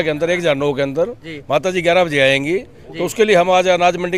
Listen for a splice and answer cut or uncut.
uncut